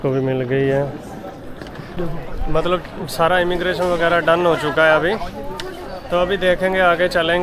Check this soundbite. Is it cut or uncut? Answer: cut